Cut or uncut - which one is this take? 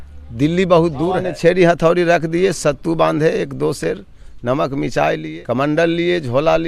cut